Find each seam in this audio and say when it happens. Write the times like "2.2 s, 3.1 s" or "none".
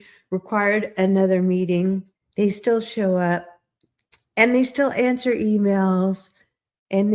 2.2 s